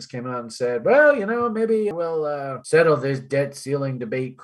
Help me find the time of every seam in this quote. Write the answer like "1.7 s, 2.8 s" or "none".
1.9 s